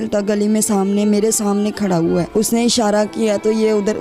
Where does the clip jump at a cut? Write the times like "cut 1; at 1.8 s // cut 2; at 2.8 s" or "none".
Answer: cut 1; at 2.3 s